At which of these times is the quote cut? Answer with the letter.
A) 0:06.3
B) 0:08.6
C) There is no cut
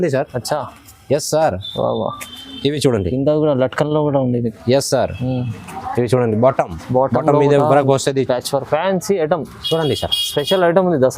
B